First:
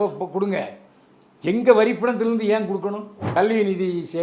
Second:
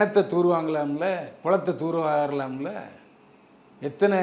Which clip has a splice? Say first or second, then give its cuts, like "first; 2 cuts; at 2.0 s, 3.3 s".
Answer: first; 1 cut; at 3.2 s